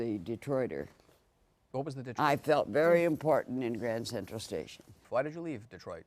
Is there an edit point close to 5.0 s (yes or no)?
yes